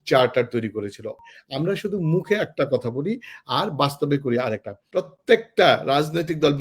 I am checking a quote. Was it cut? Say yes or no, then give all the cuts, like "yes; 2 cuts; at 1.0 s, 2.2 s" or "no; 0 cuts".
yes; 2 cuts; at 1.1 s, 4.8 s